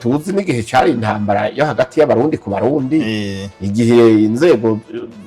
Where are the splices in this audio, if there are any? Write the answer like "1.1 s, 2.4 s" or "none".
none